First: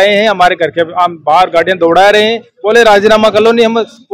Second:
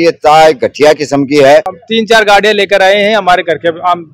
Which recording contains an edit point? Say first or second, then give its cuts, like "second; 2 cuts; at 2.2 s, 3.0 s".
second; 1 cut; at 1.8 s